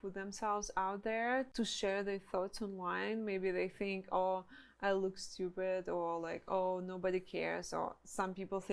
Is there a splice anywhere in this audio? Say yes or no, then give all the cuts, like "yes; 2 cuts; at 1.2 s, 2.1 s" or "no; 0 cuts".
yes; 1 cut; at 1.5 s